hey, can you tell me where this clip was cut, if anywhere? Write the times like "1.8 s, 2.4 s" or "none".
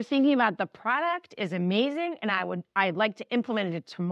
none